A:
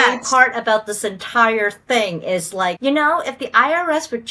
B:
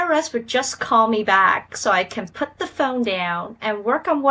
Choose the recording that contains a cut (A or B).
A